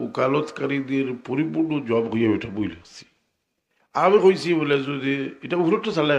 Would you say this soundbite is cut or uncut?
uncut